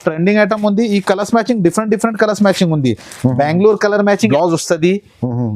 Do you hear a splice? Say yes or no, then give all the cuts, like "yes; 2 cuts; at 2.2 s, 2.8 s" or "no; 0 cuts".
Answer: yes; 1 cut; at 4.3 s